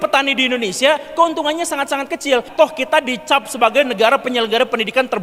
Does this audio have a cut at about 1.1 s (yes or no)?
no